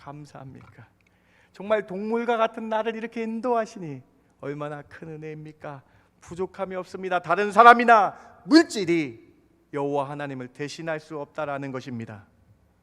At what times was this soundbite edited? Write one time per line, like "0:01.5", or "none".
none